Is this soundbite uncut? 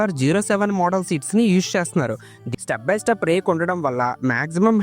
no; 1 cut; at 2.5 s

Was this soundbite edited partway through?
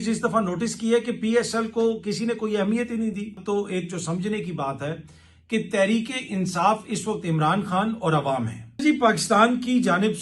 yes; 2 cuts; at 3.4 s, 8.8 s

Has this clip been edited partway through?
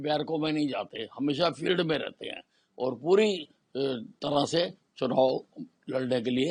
no; 0 cuts

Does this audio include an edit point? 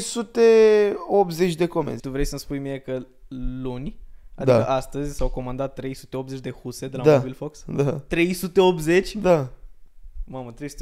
yes; 1 cut; at 2.0 s

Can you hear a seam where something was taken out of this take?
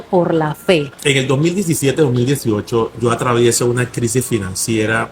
yes; 1 cut; at 0.9 s

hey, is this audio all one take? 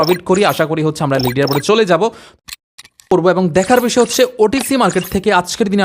no; 1 cut; at 2.7 s

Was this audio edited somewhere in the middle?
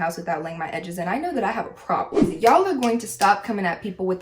yes; 1 cut; at 2.2 s

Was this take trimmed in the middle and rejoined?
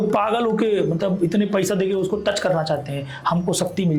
no; 0 cuts

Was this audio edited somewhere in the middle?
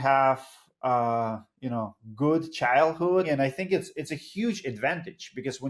yes; 1 cut; at 3.3 s

